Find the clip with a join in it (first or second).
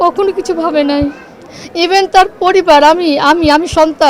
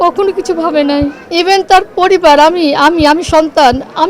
second